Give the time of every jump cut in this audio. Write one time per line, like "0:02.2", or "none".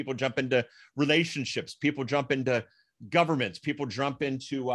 none